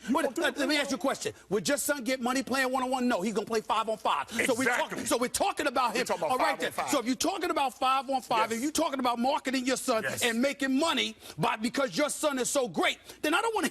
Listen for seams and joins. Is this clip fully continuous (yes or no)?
yes